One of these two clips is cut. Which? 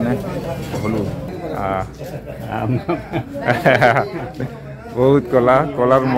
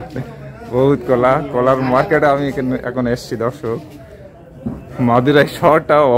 first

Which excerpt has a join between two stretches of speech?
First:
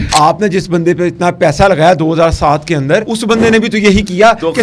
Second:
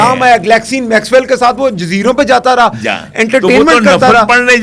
first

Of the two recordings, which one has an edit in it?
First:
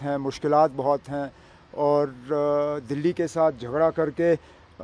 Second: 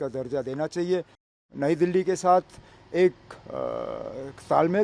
second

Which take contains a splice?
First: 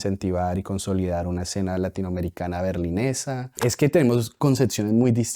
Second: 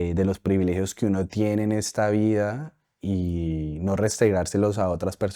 first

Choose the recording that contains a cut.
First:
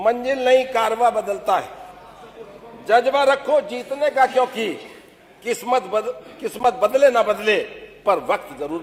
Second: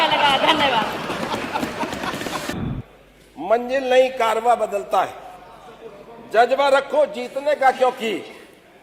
second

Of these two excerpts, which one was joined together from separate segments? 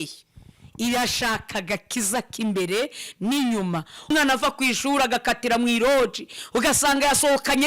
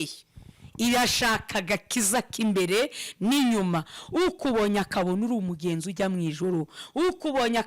first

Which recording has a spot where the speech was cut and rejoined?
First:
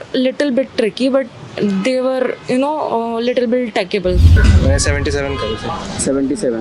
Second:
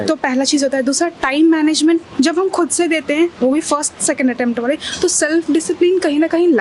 first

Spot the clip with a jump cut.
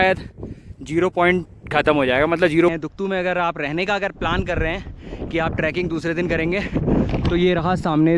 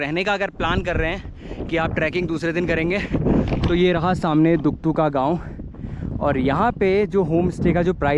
first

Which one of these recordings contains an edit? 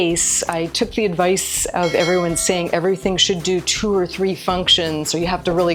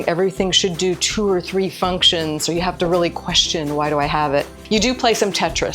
second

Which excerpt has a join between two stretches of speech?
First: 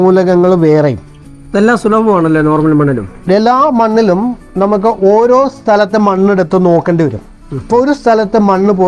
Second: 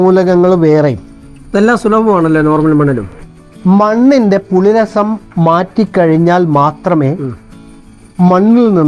second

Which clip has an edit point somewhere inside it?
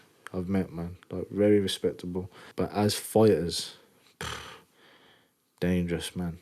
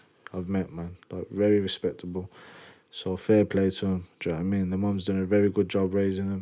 first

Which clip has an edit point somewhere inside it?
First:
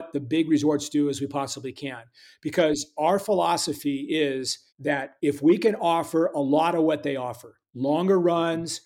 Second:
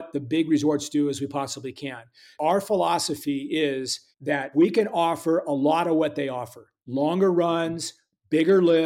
second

